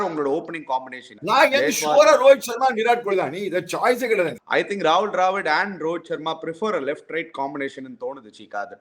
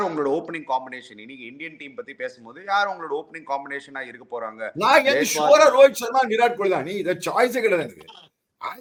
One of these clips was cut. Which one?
first; 2 cuts; at 1.1 s, 4.4 s

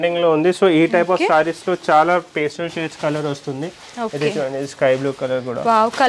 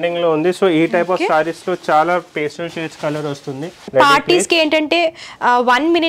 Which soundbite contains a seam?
second; 1 cut; at 3.8 s

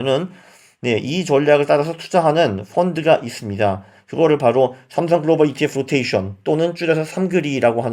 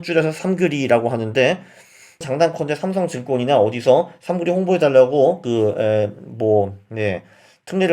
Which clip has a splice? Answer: second; 1 cut; at 2.2 s

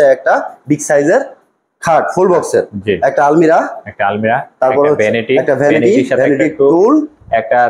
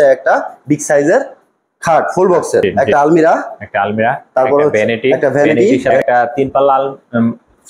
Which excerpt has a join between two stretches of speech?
second; 2 cuts; at 2.6 s, 5.9 s

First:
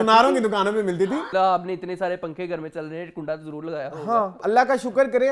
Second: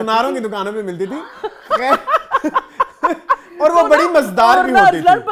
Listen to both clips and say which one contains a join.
first; 2 cuts; at 1.3 s, 4.4 s

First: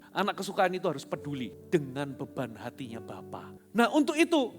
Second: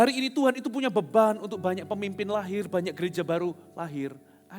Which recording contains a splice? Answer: first; 2 cuts; at 1.6 s, 3.6 s

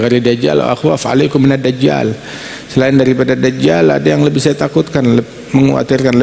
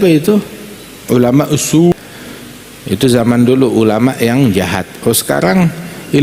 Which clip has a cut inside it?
second; 1 cut; at 1.9 s

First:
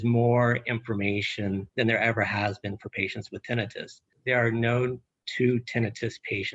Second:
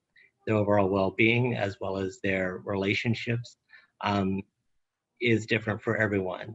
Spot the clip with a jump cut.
first; 2 cuts; at 1.7 s, 4.1 s

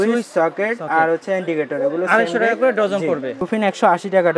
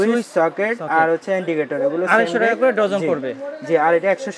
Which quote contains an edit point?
first; 1 cut; at 3.4 s

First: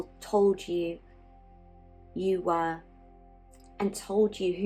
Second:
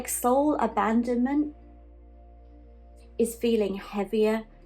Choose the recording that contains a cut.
second; 2 cuts; at 1.6 s, 3.1 s

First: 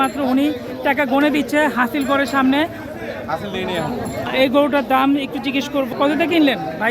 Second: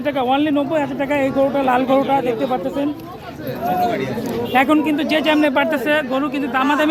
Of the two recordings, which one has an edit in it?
first; 1 cut; at 4.3 s

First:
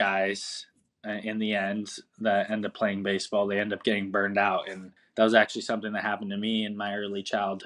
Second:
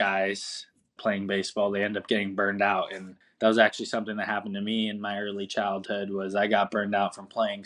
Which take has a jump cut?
second; 1 cut; at 1.0 s

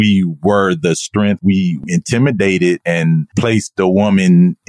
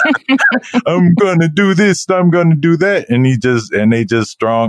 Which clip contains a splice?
first; 2 cuts; at 1.4 s, 2.8 s

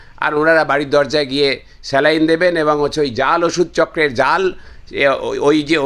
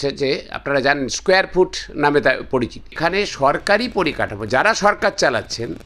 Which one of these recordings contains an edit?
second; 1 cut; at 3.0 s

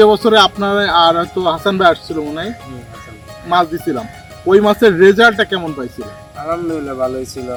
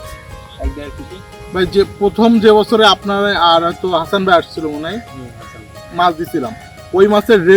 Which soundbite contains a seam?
second; 1 cut; at 1.3 s

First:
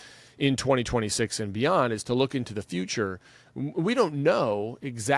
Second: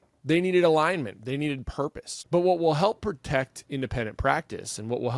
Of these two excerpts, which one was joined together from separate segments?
second; 1 cut; at 2.1 s

